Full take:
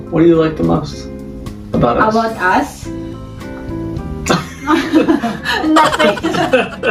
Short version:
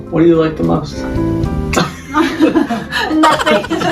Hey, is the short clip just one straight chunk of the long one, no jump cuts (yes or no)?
no